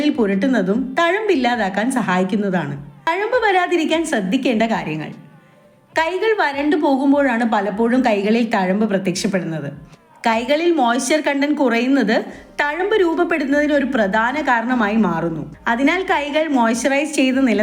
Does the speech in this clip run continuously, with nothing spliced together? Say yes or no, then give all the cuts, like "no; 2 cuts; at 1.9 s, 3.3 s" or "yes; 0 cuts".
yes; 0 cuts